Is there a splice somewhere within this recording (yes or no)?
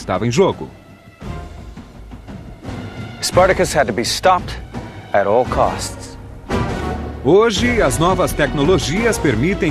no